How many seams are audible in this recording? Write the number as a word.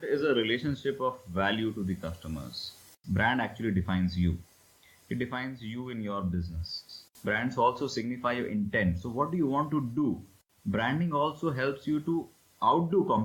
three